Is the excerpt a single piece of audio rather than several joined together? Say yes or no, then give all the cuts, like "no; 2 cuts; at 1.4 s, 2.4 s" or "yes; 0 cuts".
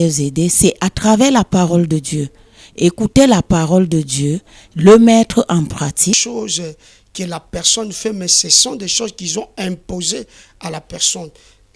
no; 1 cut; at 6.2 s